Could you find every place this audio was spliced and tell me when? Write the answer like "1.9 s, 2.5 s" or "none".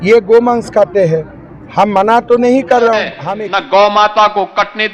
3.2 s